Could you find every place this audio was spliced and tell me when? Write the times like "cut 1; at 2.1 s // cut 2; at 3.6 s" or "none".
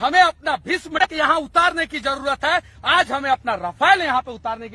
cut 1; at 1.1 s